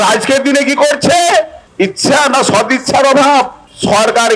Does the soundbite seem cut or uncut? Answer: uncut